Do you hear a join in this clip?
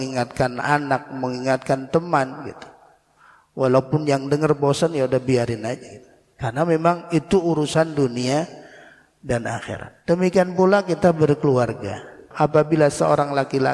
yes; 1 cut; at 12.2 s

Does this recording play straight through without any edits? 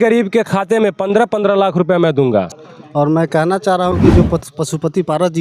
no; 1 cut; at 2.5 s

